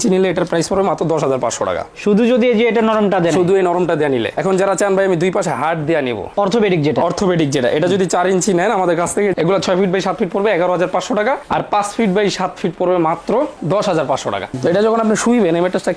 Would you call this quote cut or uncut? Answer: cut